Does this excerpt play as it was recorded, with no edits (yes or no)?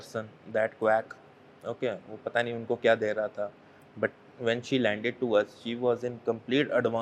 yes